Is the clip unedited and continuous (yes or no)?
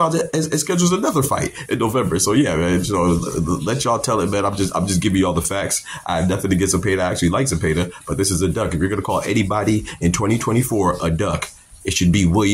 yes